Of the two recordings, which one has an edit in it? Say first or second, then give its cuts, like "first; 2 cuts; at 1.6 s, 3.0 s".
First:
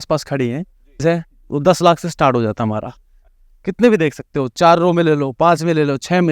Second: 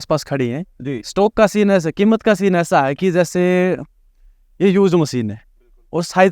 first; 2 cuts; at 1.0 s, 3.2 s